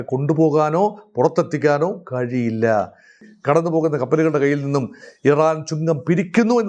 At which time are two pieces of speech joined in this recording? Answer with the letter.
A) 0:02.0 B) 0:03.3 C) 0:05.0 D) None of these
B